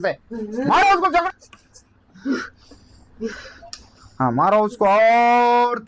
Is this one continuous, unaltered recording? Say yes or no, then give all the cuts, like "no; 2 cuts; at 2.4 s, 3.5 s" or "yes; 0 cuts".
no; 1 cut; at 1.2 s